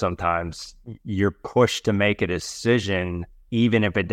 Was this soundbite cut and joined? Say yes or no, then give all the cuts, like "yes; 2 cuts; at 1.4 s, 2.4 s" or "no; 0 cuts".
no; 0 cuts